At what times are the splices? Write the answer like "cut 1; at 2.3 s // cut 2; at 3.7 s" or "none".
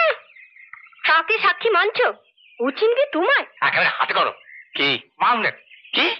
cut 1; at 3.5 s